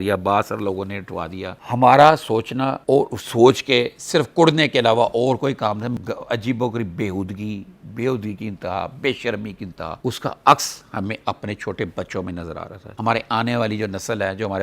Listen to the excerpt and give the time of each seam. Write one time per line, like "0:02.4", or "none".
0:01.6
0:06.0
0:10.0
0:13.0